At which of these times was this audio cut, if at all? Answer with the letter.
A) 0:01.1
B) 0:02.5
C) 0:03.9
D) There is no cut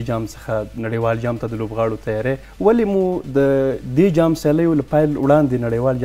B